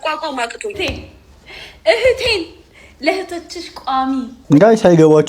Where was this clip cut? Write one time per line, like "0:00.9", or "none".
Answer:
0:04.4